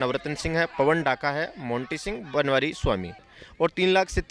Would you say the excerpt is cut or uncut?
uncut